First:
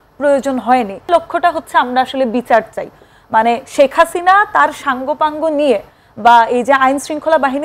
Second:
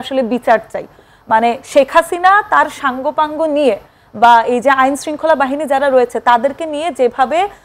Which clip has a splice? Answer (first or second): first